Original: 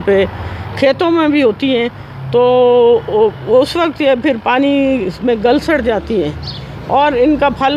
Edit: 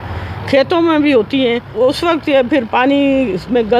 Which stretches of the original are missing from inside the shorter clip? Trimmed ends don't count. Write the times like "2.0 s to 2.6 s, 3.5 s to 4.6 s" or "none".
2.0 s to 3.4 s